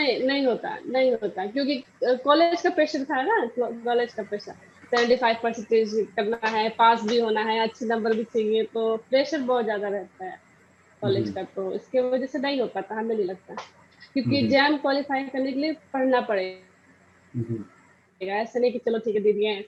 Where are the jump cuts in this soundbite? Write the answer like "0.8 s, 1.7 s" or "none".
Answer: none